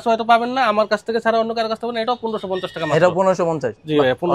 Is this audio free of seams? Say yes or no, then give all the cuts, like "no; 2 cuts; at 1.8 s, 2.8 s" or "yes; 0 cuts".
yes; 0 cuts